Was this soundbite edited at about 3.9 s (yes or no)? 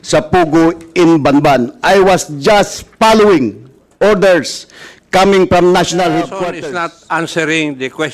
no